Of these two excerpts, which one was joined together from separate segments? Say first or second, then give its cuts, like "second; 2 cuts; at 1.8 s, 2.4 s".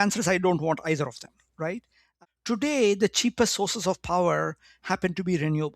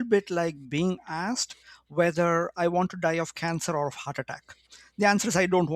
first; 1 cut; at 2.1 s